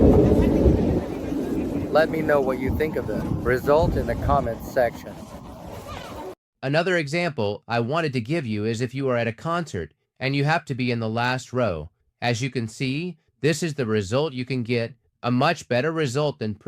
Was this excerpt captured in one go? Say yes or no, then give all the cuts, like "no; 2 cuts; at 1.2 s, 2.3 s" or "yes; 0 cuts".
no; 1 cut; at 6.4 s